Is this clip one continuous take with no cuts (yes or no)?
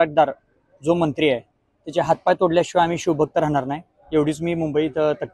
yes